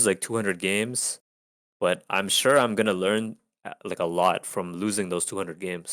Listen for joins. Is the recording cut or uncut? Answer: uncut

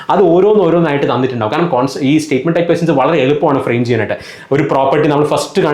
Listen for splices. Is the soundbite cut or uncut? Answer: uncut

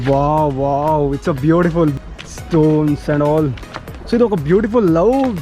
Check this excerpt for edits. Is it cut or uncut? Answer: cut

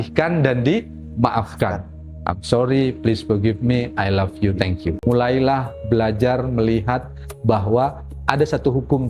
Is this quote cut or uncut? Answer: cut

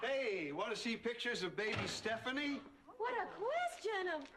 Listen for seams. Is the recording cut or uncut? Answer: cut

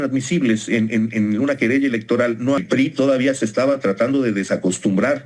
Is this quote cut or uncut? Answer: cut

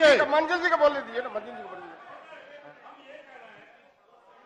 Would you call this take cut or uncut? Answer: uncut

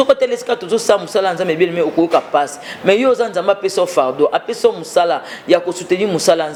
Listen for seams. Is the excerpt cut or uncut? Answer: uncut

